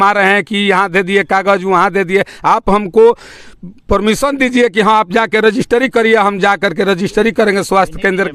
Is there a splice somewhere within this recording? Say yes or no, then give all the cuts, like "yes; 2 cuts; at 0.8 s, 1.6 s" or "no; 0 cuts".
no; 0 cuts